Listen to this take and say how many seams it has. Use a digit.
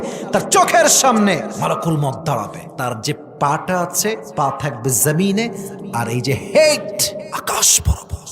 4